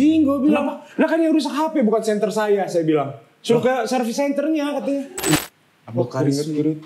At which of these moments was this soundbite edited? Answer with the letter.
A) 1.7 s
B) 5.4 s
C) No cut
B